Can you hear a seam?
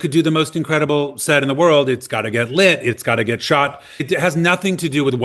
no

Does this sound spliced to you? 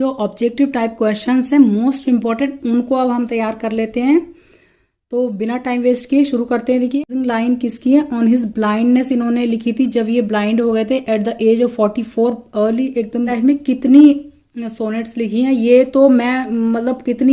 yes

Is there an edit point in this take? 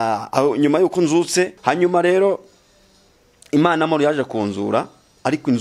yes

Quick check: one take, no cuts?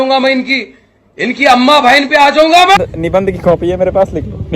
no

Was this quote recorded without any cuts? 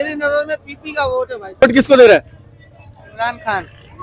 no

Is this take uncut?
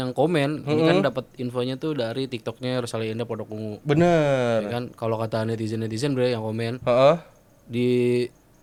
yes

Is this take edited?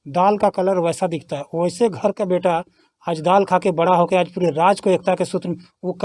no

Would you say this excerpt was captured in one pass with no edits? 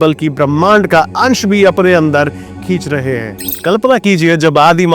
no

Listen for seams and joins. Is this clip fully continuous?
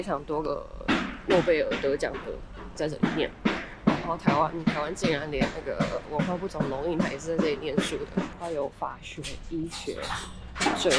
no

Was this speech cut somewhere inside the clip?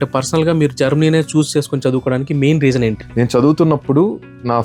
yes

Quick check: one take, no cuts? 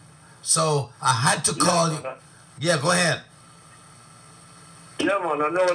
no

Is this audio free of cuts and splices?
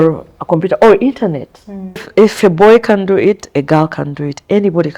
no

